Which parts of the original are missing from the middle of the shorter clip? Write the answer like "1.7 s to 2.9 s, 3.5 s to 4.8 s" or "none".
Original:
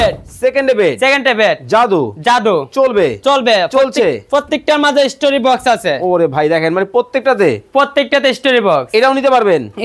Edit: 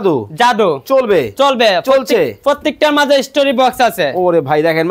none